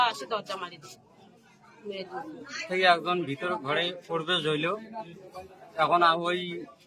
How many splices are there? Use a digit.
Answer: 1